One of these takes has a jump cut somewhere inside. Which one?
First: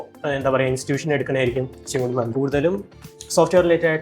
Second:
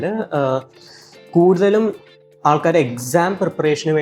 first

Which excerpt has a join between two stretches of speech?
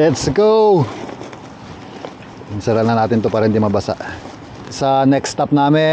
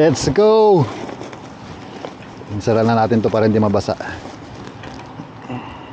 first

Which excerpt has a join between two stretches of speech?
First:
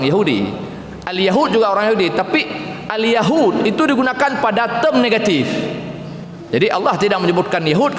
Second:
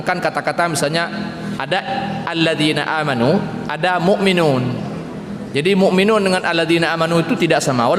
first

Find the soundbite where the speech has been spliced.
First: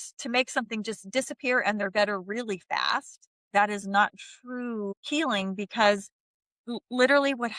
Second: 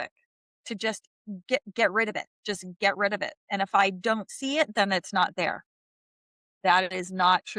first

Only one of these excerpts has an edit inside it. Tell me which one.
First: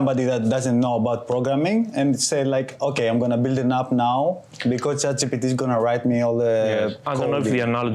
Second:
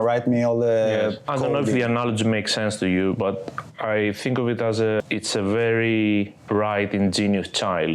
second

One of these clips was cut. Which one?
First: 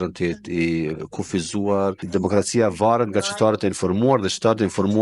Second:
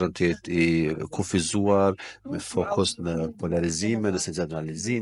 first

